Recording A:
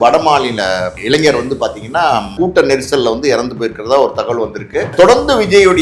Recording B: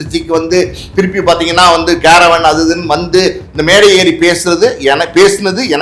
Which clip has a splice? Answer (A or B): A